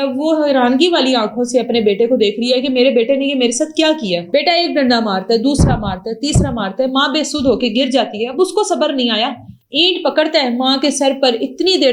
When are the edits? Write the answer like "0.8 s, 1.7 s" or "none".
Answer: none